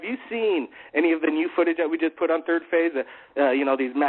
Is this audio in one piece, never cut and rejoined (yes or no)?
no